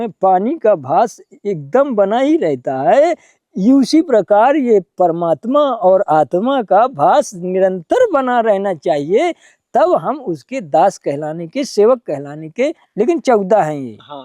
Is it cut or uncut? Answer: cut